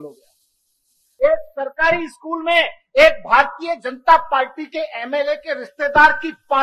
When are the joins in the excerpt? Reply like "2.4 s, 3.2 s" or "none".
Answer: 1.0 s